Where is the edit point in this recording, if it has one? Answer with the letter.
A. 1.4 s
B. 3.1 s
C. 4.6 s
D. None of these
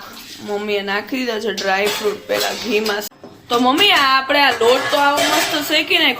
B